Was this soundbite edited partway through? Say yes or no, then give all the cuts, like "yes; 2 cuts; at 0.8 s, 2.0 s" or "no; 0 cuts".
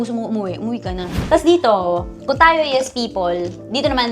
yes; 1 cut; at 1.1 s